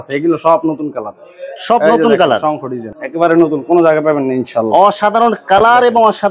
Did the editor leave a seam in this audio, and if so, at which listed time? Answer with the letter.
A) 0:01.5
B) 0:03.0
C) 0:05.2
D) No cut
B